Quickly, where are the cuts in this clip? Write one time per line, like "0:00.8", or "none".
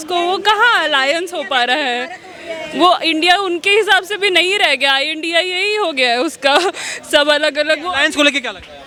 none

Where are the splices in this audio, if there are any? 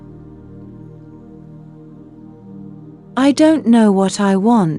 none

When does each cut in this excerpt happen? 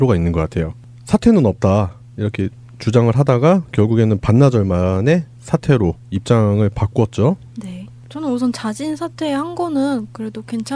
none

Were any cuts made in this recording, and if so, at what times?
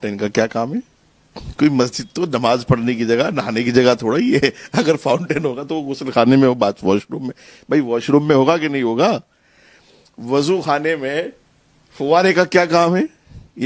none

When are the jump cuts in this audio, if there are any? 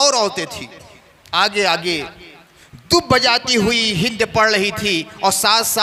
none

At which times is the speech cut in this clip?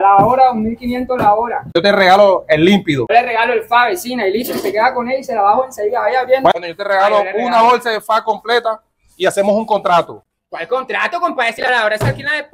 none

